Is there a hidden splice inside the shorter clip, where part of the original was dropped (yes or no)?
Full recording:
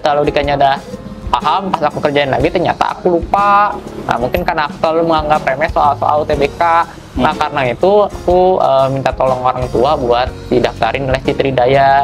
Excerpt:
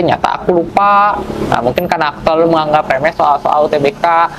no